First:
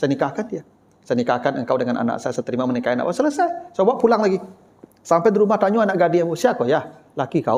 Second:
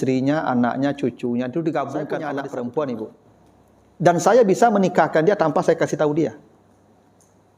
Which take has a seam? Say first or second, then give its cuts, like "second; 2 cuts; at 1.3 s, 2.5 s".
second; 1 cut; at 2.2 s